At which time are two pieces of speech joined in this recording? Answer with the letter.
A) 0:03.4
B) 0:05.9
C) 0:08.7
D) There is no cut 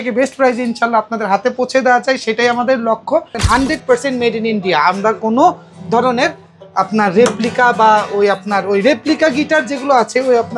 A